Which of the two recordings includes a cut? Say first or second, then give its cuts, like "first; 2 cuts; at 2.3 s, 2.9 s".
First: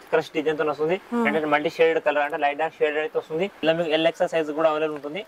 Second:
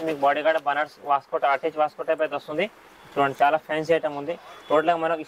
first; 1 cut; at 3.6 s